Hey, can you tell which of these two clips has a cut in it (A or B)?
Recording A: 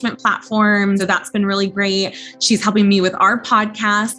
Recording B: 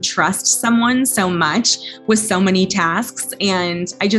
A